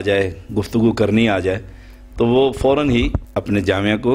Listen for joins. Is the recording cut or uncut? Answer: cut